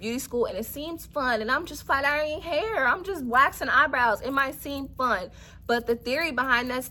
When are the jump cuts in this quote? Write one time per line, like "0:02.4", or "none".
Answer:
none